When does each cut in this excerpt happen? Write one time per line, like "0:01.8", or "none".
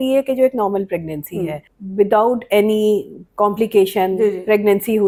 none